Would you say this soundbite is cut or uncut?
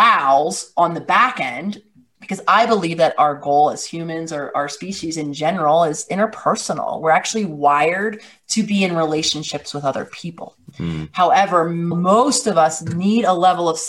uncut